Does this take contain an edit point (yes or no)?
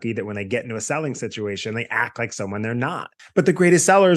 yes